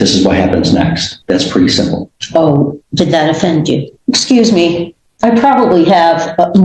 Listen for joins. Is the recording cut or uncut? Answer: cut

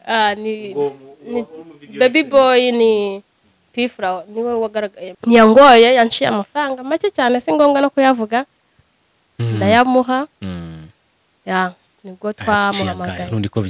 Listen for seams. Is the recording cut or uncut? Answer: cut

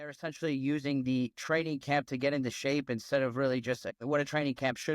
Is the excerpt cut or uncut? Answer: cut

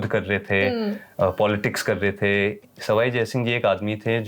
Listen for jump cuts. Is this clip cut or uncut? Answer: uncut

